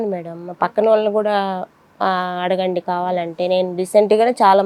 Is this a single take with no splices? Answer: yes; 0 cuts

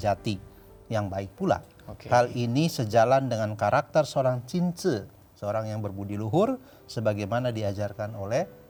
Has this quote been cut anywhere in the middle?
no; 0 cuts

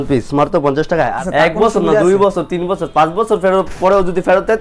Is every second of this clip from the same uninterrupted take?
no; 1 cut; at 1.2 s

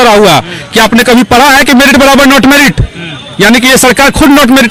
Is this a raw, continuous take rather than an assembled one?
yes; 0 cuts

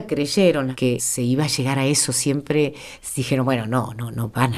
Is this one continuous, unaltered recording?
no; 1 cut; at 0.9 s

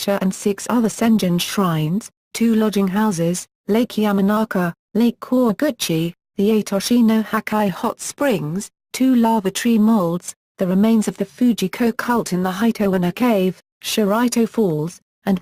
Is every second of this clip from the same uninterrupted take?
no; 1 cut; at 11.2 s

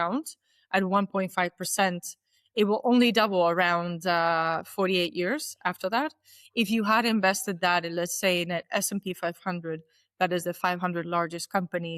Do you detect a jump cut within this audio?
no; 0 cuts

